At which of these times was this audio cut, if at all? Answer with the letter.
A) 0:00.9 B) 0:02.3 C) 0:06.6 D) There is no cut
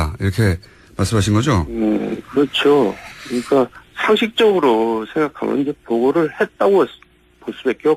A